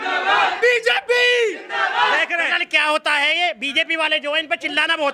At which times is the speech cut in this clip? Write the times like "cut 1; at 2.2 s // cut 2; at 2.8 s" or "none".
none